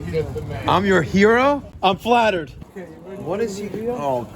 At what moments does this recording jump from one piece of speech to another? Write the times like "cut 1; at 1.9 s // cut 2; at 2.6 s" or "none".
cut 1; at 1.7 s // cut 2; at 2.6 s